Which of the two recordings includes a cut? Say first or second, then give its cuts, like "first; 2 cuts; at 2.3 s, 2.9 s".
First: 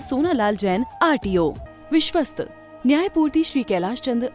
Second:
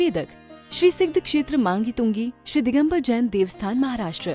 first; 1 cut; at 1.7 s